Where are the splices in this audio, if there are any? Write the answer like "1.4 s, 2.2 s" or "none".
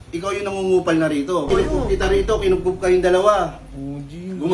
1.5 s